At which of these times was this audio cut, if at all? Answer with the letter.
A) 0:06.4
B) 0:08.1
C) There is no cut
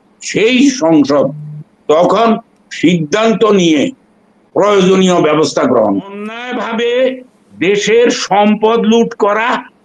A